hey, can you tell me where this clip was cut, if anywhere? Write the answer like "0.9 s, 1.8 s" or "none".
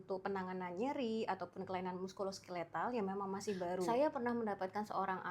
3.9 s